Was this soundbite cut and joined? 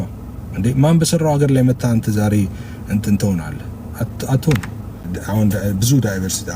yes; 1 cut; at 5.0 s

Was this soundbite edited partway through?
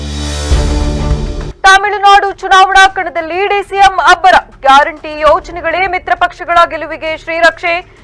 no; 0 cuts

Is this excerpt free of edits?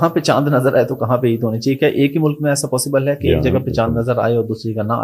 yes; 0 cuts

